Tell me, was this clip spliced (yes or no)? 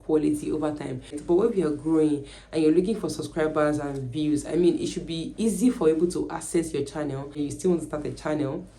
yes